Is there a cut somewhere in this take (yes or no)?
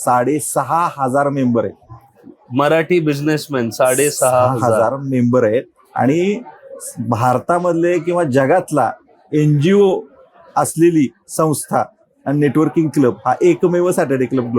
no